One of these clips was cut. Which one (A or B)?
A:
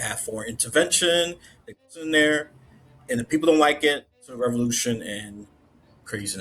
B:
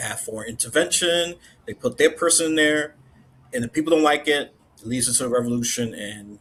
A